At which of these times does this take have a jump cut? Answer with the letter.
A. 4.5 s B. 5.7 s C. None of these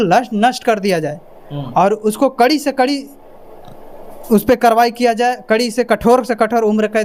C